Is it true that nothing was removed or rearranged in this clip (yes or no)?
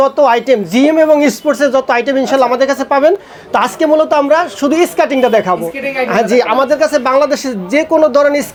yes